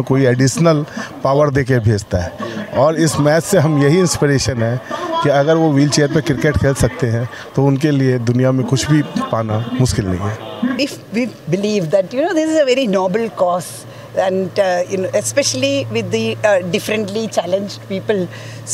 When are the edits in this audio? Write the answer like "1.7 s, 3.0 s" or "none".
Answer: 10.8 s